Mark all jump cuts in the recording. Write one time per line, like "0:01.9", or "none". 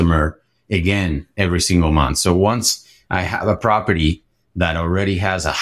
none